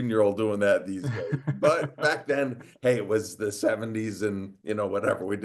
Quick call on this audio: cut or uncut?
cut